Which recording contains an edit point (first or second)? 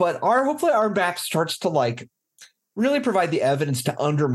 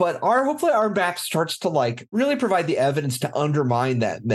second